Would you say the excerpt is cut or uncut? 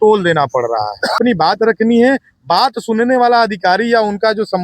cut